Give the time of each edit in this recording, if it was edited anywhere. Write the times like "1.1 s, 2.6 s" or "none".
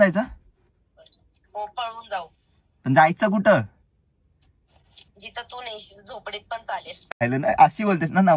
7.2 s